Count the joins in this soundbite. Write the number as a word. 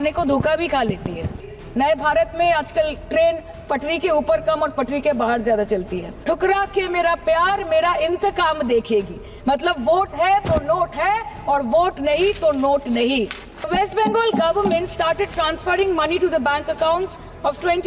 three